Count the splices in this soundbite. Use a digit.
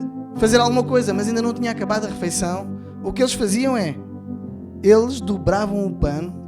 0